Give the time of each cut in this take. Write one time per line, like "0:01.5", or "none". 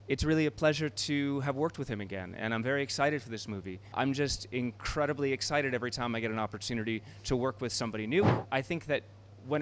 0:03.9
0:08.4